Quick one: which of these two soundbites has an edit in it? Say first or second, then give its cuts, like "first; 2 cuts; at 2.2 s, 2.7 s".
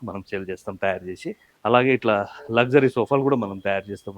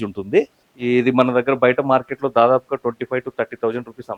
first; 1 cut; at 1.5 s